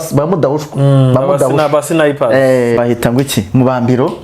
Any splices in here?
yes; 1 cut; at 2.8 s

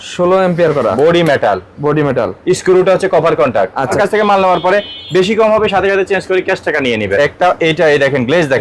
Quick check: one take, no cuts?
no; 2 cuts; at 3.9 s, 7.2 s

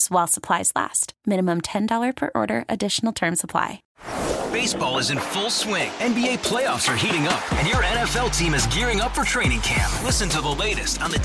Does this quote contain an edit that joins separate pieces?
yes; 1 cut; at 3.8 s

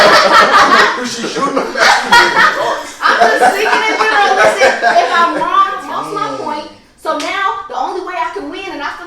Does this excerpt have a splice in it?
yes; 1 cut; at 5.8 s

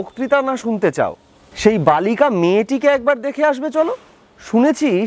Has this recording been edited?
no; 0 cuts

